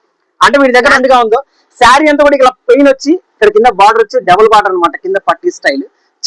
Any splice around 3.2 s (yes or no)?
no